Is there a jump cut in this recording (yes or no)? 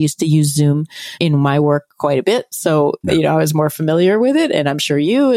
yes